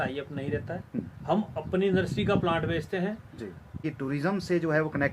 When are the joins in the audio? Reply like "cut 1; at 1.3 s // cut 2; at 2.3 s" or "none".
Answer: cut 1; at 3.8 s